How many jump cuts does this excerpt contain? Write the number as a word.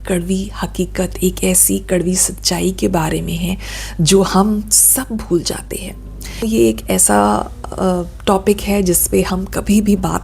one